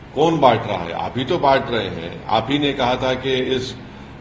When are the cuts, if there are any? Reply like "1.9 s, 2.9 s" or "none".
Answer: none